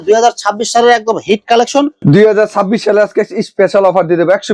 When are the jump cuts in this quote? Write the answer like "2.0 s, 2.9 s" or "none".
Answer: 1.9 s